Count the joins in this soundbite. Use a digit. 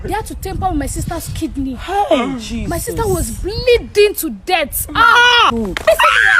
1